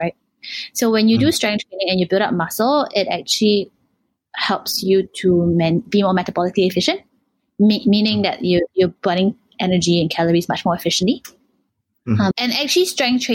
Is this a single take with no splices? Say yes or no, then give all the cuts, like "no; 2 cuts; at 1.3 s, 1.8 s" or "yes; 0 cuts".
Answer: no; 1 cut; at 12.3 s